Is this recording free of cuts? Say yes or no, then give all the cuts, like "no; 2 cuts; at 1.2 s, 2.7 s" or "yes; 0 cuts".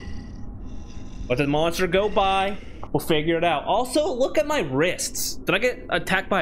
yes; 0 cuts